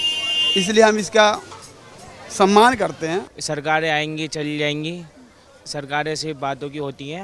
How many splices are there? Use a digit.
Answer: 1